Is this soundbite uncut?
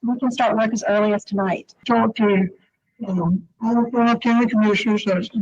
no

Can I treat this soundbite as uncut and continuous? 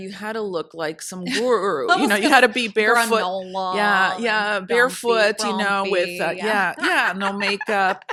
yes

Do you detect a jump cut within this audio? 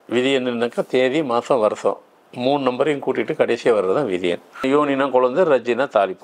yes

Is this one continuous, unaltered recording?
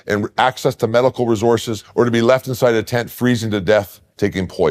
no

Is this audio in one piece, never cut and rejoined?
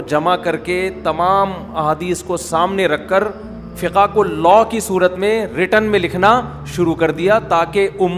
no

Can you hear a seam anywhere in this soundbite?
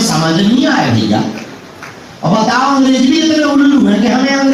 no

